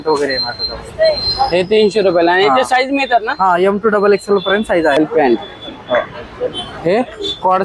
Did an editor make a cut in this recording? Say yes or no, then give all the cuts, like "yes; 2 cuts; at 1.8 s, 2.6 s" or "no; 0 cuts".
yes; 1 cut; at 5.0 s